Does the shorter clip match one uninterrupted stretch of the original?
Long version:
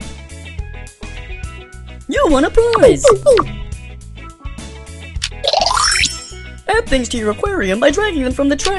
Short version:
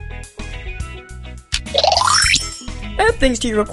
no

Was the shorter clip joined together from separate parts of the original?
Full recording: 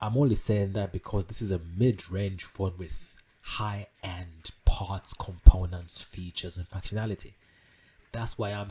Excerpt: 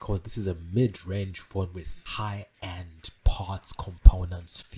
yes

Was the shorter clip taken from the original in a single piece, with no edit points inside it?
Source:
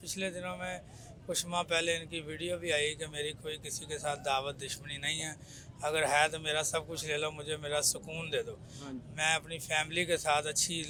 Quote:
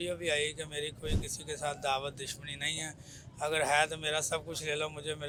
yes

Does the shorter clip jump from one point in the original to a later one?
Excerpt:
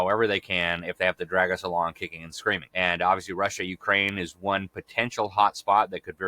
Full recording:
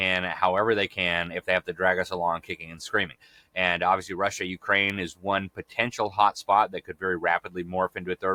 yes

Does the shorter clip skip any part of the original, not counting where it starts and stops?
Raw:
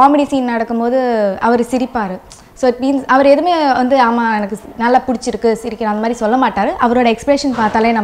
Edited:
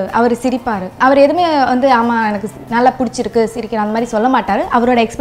yes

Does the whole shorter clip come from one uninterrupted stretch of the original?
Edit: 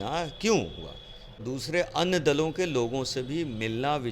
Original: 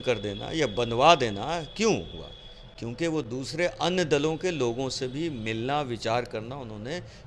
no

